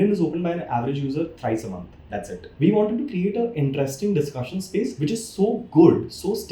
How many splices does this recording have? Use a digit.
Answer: 2